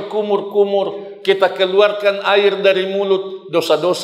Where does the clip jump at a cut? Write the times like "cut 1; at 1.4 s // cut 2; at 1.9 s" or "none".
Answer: none